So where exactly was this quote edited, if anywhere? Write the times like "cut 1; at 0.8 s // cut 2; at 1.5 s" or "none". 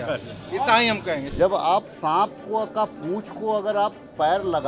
cut 1; at 1.3 s